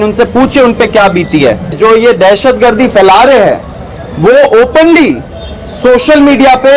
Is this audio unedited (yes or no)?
no